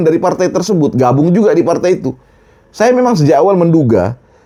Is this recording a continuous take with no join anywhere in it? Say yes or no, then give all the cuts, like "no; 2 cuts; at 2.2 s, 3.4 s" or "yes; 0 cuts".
yes; 0 cuts